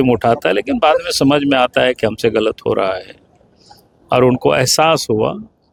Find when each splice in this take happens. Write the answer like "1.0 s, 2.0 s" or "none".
none